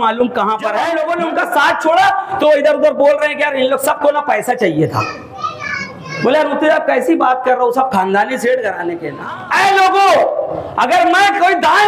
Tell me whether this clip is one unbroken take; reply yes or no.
no